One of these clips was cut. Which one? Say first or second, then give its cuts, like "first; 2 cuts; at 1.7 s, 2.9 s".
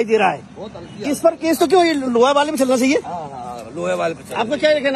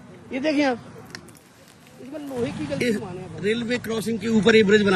second; 1 cut; at 2.8 s